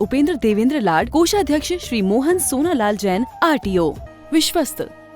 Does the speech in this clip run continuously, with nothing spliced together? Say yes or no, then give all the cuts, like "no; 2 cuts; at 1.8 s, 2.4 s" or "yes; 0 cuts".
no; 1 cut; at 4.1 s